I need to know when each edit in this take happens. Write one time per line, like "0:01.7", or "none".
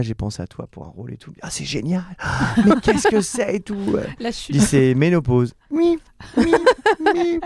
none